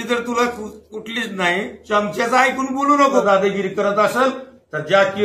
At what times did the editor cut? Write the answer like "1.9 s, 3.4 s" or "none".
3.2 s